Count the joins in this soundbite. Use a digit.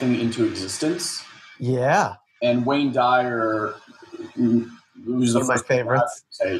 1